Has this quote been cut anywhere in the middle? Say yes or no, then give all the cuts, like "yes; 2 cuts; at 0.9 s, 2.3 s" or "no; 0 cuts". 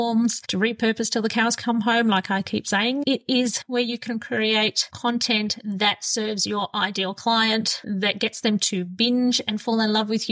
yes; 1 cut; at 3.0 s